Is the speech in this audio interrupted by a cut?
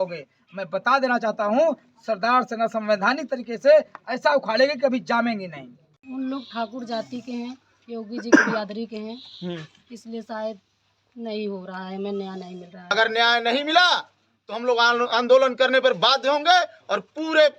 yes; 2 cuts; at 6.0 s, 12.8 s

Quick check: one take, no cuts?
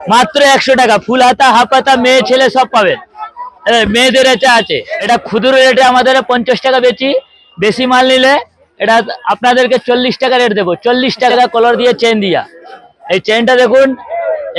no; 2 cuts; at 4.9 s, 11.3 s

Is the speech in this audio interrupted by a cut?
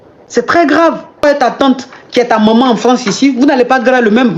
yes; 1 cut; at 1.2 s

